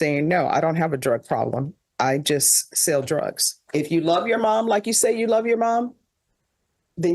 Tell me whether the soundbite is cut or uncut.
cut